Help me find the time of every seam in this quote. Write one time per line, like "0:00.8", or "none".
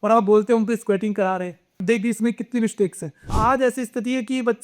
0:01.7
0:03.3

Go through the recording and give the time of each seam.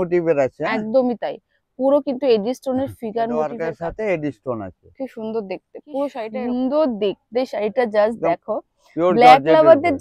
0:03.5
0:06.3

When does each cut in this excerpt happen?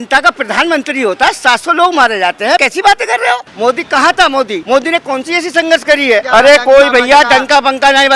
0:02.6
0:03.5
0:04.6
0:06.3

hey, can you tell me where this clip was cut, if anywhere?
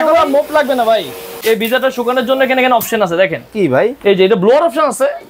0:01.3

